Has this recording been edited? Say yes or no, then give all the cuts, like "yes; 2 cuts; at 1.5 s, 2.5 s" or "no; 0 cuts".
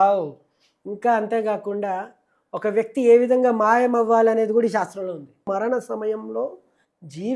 yes; 1 cut; at 5.5 s